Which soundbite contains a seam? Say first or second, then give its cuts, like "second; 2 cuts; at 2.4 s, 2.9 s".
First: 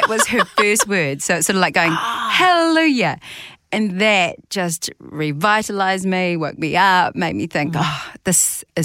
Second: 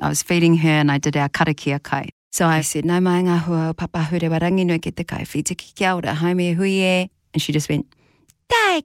second; 1 cut; at 2.4 s